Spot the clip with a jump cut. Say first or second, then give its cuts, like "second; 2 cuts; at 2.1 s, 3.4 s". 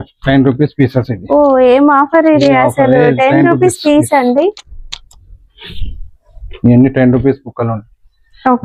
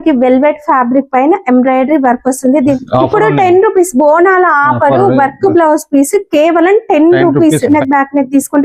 second; 2 cuts; at 2.8 s, 7.7 s